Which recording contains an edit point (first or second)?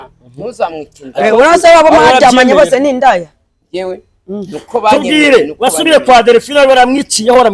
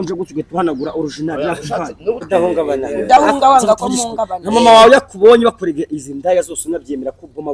second